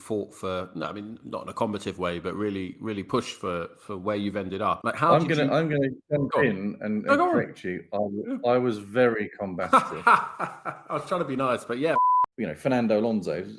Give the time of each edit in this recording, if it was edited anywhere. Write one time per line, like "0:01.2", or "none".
0:04.8
0:12.0